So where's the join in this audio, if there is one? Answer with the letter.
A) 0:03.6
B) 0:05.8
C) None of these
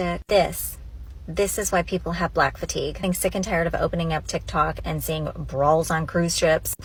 C